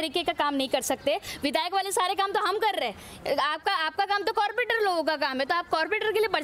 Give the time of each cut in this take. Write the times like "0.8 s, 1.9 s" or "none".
1.3 s, 3.0 s